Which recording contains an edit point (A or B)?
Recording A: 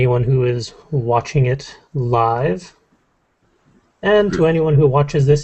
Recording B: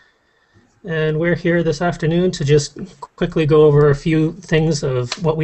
B